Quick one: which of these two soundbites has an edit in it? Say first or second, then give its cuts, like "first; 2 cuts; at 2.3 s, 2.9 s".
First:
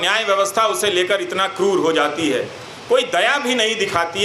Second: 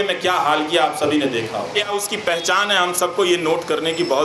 second; 1 cut; at 1.8 s